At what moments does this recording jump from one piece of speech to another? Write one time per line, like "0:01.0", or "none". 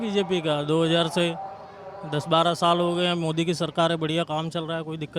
none